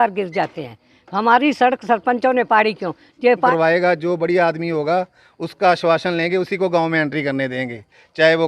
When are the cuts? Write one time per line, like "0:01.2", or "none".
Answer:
0:03.5

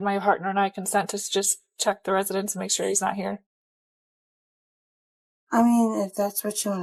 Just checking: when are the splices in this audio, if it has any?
none

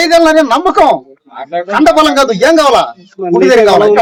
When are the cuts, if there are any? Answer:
none

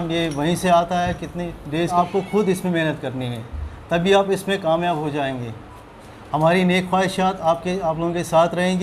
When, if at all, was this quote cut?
0:01.9

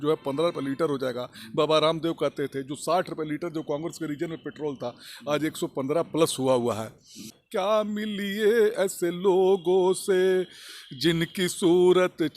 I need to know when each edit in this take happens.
0:07.4

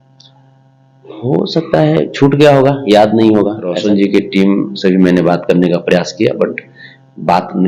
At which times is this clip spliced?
0:03.7

